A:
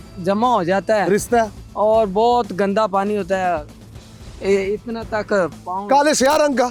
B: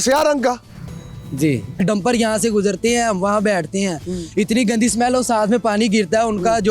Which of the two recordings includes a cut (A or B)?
B